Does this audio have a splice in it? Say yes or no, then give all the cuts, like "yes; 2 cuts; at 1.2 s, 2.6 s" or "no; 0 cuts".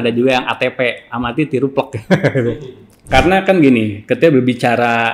yes; 1 cut; at 3.1 s